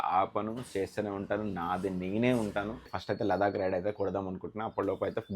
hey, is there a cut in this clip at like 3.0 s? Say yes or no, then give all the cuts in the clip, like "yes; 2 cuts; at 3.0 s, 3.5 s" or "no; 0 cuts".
yes; 1 cut; at 3.0 s